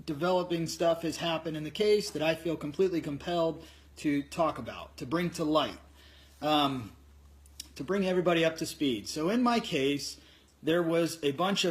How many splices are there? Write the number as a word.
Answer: one